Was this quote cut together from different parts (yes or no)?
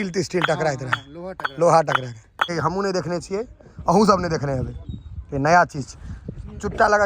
yes